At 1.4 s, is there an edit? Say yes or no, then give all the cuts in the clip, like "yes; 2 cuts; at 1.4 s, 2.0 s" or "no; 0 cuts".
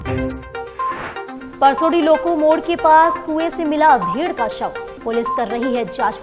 yes; 1 cut; at 1.4 s